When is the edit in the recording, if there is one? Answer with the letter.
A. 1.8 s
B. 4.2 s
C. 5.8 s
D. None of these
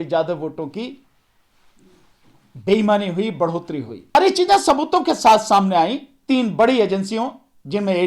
B